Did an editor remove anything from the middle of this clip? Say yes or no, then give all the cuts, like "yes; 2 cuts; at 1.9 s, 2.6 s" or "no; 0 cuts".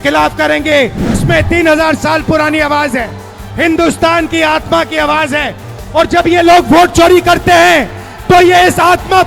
yes; 1 cut; at 1.2 s